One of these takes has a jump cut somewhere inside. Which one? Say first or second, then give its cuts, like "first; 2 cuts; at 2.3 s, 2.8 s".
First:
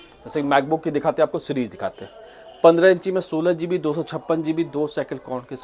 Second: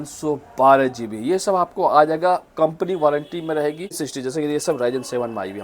second; 1 cut; at 4.1 s